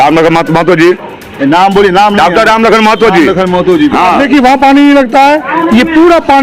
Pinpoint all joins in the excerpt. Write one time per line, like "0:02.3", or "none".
0:04.2